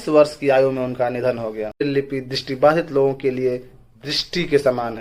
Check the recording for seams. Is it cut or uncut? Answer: cut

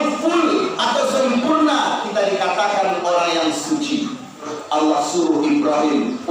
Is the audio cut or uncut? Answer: cut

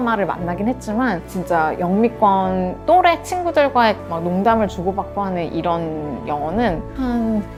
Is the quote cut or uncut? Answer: uncut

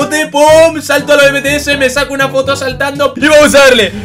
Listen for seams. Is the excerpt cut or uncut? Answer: cut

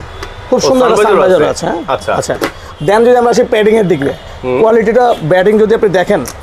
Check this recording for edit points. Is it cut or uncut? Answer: uncut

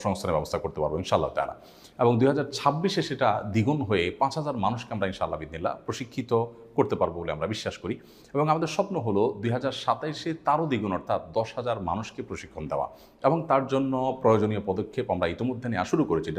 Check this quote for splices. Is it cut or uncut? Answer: uncut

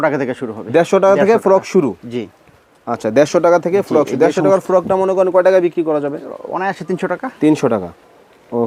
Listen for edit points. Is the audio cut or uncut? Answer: uncut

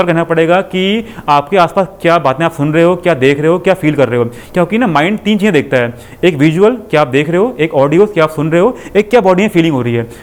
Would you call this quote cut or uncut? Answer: uncut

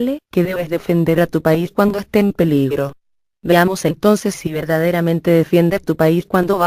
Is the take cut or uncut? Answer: uncut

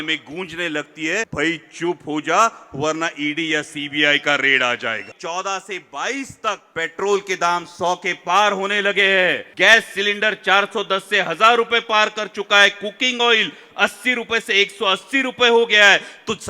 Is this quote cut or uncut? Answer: cut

